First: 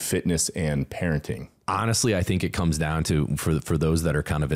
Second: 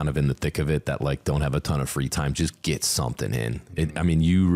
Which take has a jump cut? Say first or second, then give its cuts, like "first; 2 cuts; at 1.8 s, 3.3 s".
first; 1 cut; at 1.5 s